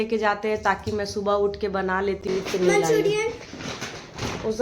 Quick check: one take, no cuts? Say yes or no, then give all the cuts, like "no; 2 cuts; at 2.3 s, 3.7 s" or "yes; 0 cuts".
no; 1 cut; at 2.2 s